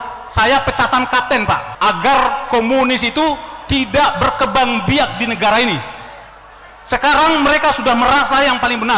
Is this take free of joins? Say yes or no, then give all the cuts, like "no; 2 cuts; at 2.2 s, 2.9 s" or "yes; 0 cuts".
no; 1 cut; at 1.7 s